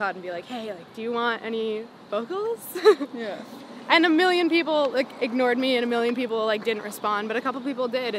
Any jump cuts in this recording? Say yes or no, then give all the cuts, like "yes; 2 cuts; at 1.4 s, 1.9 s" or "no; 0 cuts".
no; 0 cuts